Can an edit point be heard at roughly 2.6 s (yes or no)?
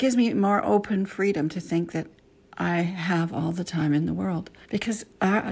no